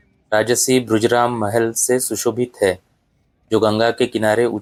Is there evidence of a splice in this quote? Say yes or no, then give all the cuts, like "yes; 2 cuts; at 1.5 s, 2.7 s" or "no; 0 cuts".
no; 0 cuts